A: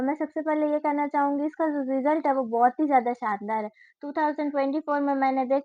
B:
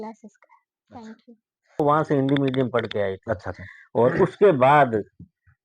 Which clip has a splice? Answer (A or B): B